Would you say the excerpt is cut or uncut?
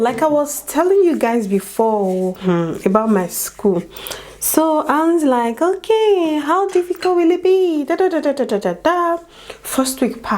uncut